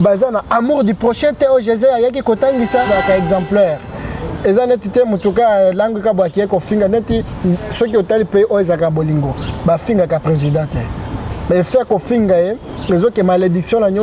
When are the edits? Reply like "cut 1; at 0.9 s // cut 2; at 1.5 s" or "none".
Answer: cut 1; at 2.9 s